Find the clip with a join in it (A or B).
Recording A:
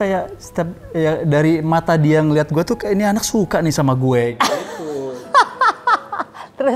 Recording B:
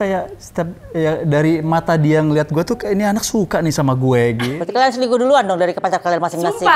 B